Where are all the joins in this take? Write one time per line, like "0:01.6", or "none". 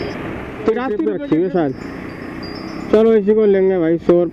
0:01.1